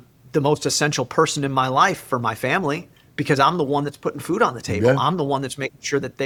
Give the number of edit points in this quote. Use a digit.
0